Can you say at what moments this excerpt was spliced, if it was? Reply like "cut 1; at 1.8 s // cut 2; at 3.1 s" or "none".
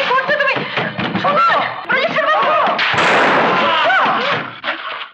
cut 1; at 1.8 s

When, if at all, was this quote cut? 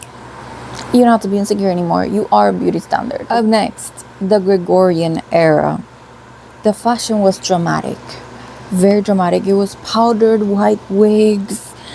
none

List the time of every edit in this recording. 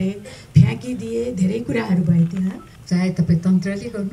cut 1; at 2.7 s

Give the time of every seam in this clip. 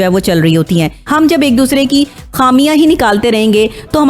cut 1; at 1.0 s

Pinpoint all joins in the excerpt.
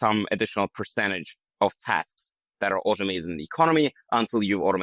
none

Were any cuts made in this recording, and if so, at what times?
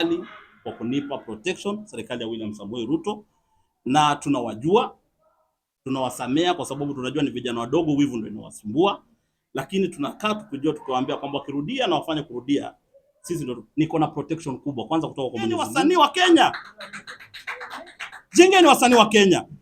cut 1; at 15.7 s

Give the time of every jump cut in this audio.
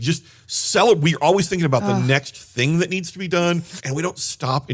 cut 1; at 3.8 s

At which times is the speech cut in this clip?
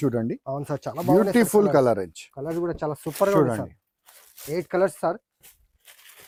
none

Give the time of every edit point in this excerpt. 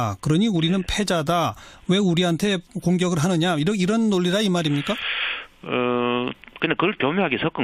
cut 1; at 2.0 s

